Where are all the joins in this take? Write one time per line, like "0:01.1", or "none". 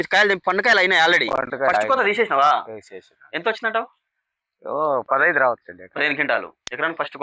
none